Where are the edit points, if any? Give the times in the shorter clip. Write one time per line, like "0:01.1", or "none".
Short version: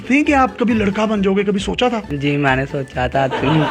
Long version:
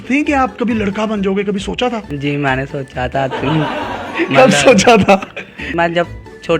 none